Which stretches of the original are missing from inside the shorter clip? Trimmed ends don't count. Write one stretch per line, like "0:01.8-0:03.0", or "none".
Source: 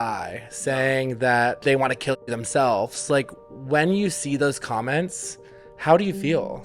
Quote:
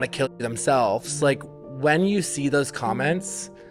none